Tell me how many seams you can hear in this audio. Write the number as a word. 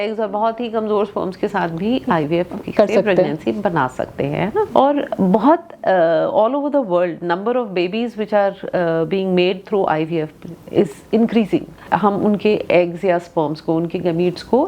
two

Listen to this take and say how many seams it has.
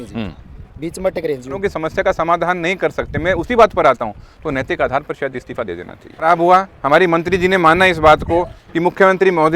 two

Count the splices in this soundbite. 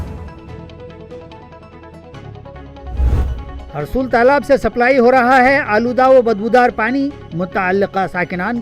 one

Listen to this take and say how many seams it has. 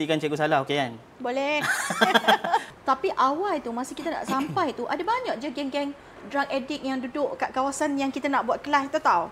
one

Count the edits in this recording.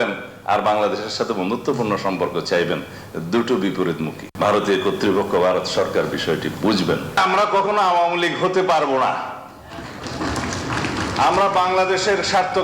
one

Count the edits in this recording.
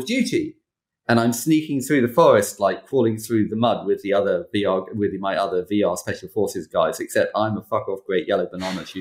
zero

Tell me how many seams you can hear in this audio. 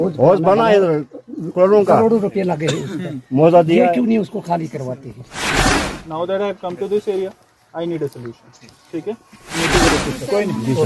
two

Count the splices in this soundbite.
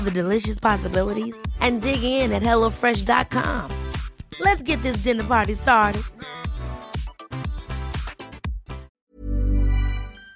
one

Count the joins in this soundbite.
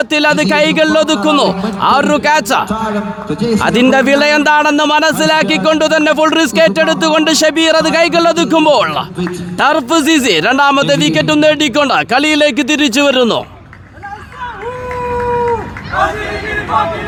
zero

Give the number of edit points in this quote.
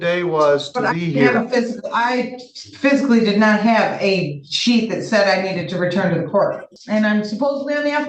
one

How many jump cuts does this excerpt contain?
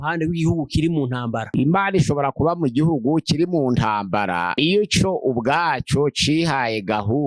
one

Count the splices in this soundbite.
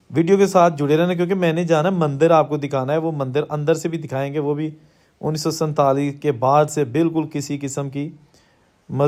zero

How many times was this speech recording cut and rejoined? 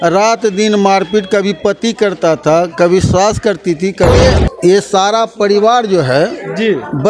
one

